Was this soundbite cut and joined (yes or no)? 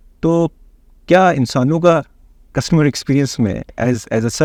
no